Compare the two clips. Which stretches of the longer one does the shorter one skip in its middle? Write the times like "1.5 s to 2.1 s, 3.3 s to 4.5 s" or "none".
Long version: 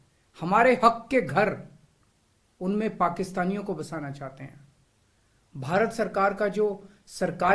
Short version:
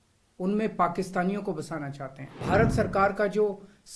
4.5 s to 5.5 s

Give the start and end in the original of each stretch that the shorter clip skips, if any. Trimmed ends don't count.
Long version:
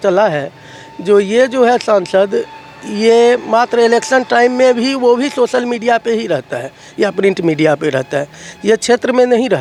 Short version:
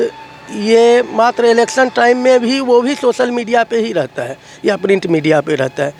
none

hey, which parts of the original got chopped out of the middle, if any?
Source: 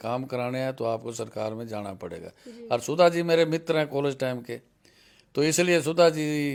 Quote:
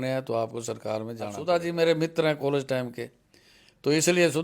1.9 s to 2.9 s

